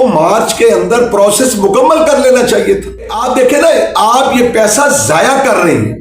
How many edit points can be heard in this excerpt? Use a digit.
1